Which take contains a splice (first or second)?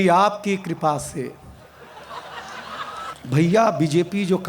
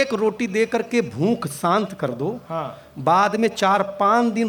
first